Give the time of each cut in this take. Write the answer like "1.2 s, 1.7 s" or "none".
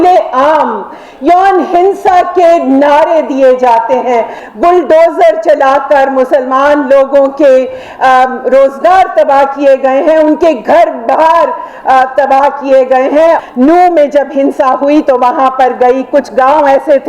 4.4 s, 13.4 s